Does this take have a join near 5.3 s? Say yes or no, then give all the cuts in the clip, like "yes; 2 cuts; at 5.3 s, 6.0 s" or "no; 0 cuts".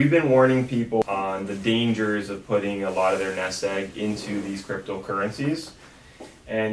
no; 1 cut; at 1.0 s